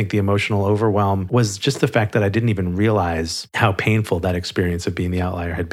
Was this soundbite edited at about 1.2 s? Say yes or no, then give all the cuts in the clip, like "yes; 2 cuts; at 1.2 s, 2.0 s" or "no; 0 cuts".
yes; 1 cut; at 1.2 s